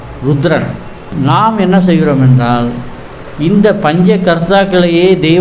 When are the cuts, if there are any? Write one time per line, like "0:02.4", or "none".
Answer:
0:01.1